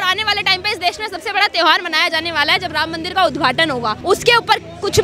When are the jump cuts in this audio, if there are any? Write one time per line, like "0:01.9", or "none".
0:04.0